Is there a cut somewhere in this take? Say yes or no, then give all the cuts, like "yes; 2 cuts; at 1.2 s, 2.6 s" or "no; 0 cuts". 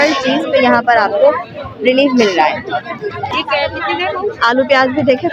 no; 0 cuts